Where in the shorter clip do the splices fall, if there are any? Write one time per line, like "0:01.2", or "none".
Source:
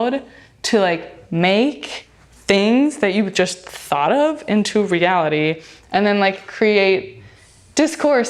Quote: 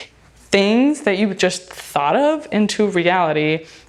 none